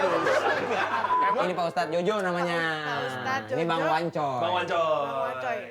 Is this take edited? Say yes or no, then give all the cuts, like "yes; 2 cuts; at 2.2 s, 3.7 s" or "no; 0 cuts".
yes; 1 cut; at 1.2 s